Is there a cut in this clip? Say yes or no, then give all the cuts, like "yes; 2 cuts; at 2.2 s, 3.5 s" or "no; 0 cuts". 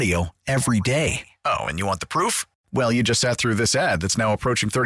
no; 0 cuts